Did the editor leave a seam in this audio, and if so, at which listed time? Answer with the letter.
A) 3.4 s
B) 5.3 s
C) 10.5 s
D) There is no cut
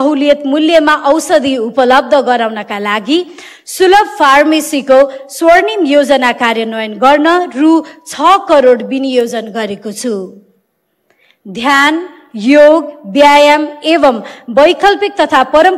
D